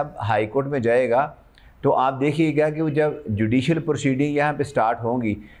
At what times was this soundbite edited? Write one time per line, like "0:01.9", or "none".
none

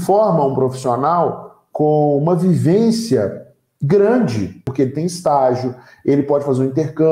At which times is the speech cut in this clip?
0:04.6

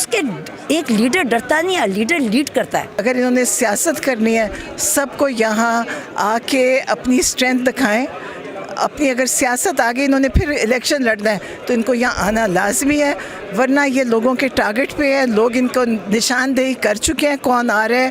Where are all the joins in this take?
0:03.0

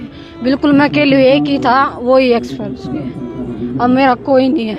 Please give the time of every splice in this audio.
none

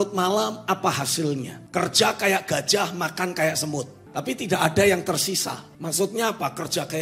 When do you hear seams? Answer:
0:01.6
0:04.0
0:05.7

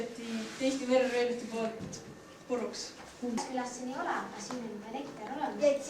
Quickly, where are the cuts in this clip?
0:03.4

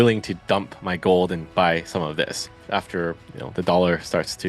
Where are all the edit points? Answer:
0:02.6

